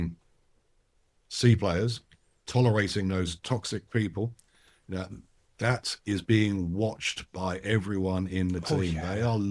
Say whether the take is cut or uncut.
uncut